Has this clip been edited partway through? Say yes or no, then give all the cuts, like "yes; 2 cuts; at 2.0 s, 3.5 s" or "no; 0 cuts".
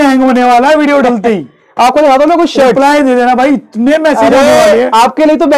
no; 0 cuts